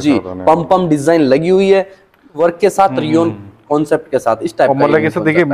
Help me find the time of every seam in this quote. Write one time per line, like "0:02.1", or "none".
0:02.4